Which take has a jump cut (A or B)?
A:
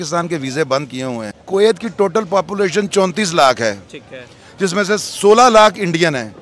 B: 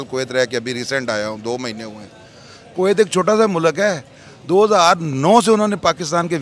A